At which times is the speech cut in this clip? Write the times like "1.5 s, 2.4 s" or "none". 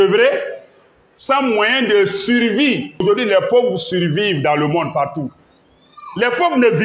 3.0 s